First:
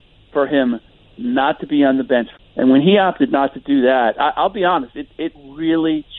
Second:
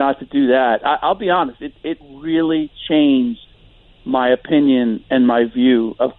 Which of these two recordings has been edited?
first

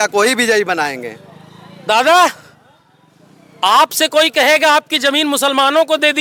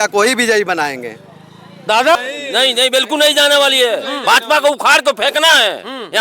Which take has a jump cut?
second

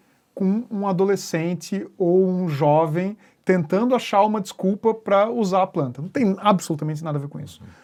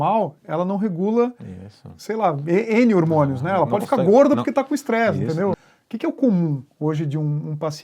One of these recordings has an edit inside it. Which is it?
second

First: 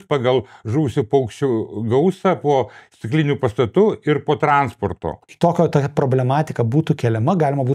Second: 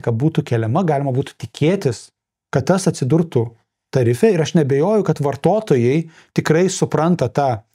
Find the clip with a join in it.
first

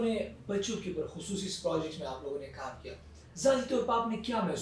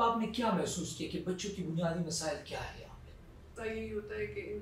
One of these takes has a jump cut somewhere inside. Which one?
second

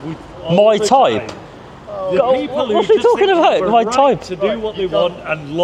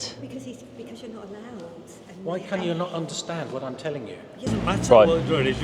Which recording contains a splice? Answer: second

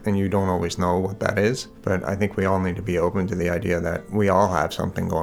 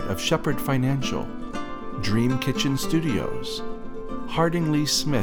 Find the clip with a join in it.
first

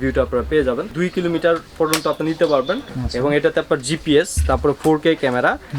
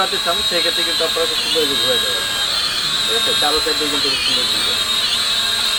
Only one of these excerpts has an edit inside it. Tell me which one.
first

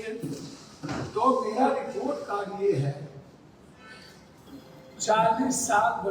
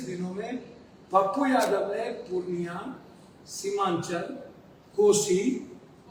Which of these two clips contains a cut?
first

